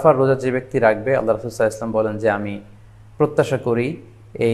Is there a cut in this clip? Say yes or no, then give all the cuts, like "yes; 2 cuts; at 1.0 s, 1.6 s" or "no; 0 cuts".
no; 0 cuts